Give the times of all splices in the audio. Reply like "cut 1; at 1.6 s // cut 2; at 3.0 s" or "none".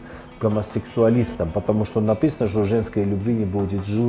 none